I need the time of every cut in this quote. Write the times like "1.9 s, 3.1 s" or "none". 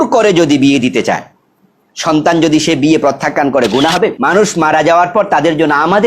4.2 s